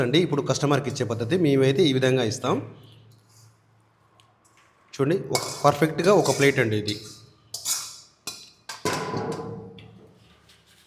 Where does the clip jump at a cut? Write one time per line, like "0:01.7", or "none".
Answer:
none